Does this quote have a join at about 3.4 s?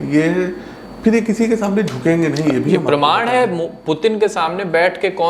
no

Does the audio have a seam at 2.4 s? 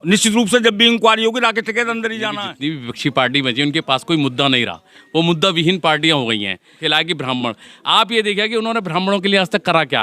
yes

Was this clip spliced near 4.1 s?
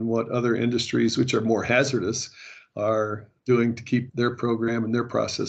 yes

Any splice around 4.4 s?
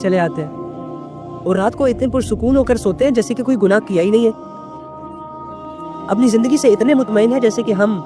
yes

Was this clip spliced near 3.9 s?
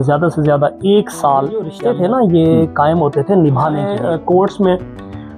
yes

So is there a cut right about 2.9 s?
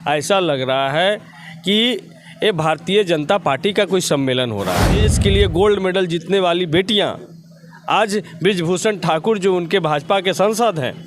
no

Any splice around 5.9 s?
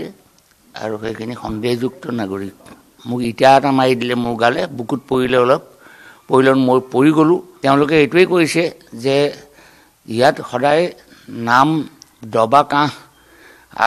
no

